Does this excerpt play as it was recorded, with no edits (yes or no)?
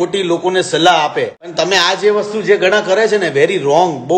no